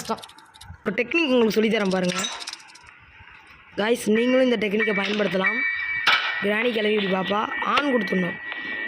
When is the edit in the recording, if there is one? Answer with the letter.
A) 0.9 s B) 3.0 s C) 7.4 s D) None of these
A